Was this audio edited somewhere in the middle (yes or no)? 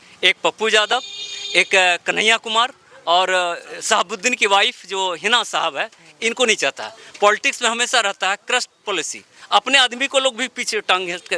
no